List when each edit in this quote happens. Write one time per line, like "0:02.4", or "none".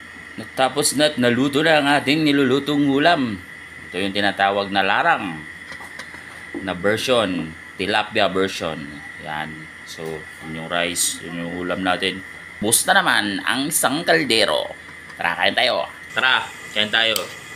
0:12.5
0:16.0